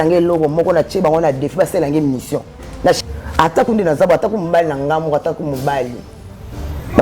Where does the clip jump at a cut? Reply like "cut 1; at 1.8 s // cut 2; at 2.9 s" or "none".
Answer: cut 1; at 3.0 s